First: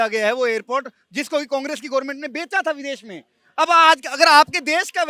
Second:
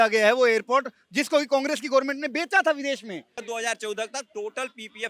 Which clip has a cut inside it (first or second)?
second